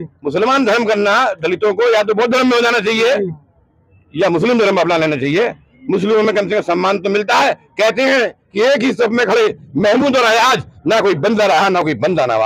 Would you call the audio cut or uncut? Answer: uncut